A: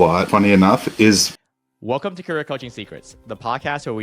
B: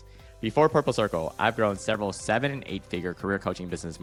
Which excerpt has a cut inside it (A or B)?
A